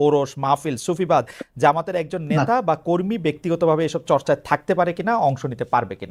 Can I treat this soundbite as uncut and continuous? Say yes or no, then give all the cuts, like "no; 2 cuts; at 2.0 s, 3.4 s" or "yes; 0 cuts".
yes; 0 cuts